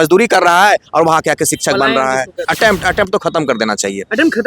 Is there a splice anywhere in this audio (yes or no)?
yes